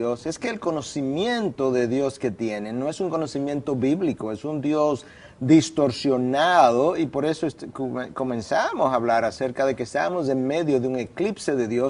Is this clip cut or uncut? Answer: cut